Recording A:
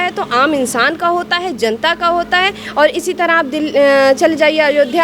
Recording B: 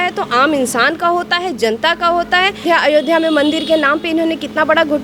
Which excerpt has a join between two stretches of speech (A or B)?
B